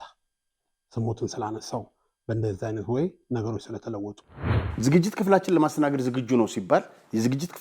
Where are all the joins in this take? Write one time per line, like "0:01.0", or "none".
0:04.2